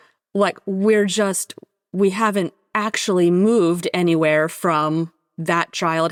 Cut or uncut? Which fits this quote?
uncut